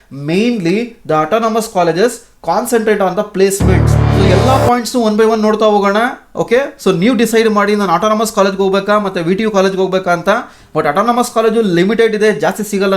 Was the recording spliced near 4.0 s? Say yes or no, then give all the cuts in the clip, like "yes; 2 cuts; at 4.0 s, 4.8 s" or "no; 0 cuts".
yes; 1 cut; at 4.0 s